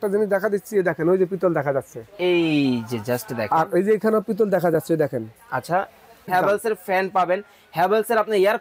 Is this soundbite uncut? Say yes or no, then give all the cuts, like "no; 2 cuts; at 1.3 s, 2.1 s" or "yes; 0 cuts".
no; 1 cut; at 6.3 s